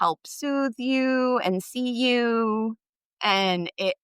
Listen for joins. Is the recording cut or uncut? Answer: uncut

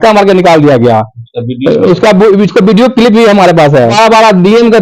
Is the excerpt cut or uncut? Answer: cut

